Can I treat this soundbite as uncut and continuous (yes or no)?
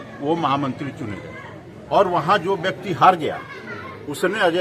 yes